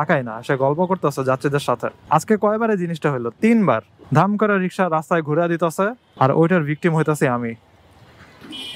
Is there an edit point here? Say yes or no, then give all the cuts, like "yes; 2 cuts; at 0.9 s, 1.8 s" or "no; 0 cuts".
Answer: no; 0 cuts